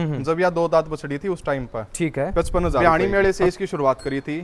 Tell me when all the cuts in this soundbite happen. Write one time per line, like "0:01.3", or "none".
0:02.8